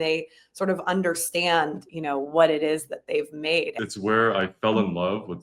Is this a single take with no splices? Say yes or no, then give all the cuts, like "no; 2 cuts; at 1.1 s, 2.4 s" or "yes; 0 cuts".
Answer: no; 1 cut; at 3.8 s